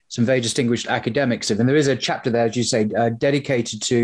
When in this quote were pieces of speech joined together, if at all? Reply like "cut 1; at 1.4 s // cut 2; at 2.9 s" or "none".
cut 1; at 1.5 s